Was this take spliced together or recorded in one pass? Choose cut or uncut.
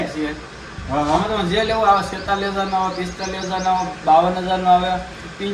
uncut